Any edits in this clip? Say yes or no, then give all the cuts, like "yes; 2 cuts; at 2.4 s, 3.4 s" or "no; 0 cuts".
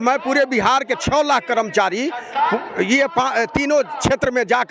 no; 0 cuts